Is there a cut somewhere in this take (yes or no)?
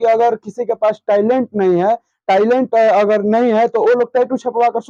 no